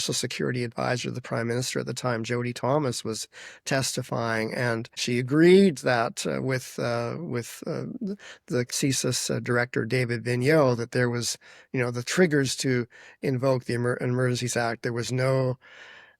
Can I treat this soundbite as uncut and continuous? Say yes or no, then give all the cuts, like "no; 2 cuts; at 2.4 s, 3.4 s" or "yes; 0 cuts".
no; 2 cuts; at 5.0 s, 8.7 s